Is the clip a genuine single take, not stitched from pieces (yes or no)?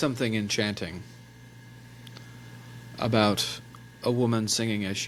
yes